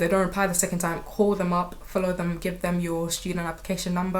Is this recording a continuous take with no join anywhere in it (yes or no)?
yes